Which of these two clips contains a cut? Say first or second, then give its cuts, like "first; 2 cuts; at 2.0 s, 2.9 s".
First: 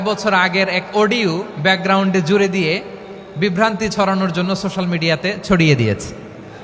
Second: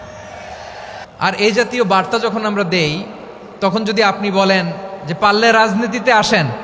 second; 1 cut; at 1.0 s